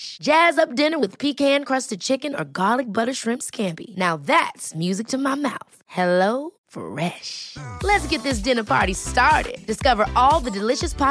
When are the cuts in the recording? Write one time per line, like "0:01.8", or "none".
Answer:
none